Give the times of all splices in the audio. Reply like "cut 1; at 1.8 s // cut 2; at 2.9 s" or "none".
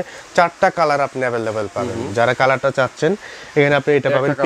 none